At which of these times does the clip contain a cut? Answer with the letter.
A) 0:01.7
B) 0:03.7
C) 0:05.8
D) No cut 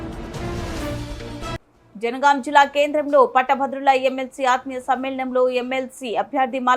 A